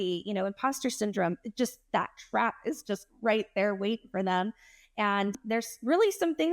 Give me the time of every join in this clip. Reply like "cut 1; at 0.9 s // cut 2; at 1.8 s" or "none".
cut 1; at 5.4 s